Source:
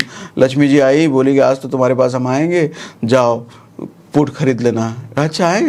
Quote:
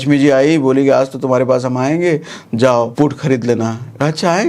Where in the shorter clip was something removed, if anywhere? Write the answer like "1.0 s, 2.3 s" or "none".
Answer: 2.9 s